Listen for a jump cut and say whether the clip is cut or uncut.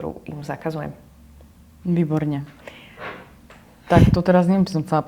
uncut